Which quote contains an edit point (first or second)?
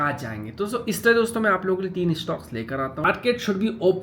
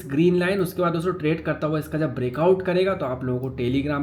first